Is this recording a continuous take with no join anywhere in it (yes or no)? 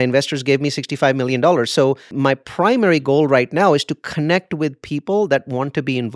no